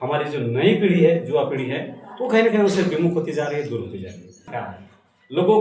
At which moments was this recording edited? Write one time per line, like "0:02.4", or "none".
0:04.5